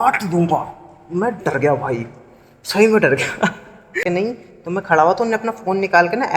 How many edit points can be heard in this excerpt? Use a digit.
1